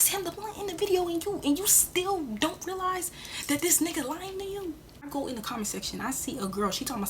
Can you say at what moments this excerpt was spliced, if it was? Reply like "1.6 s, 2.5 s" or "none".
5.1 s